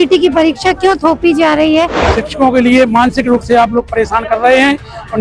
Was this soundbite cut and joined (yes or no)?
yes